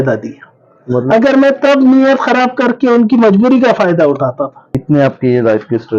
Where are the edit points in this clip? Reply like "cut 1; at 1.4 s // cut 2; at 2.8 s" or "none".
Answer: cut 1; at 4.7 s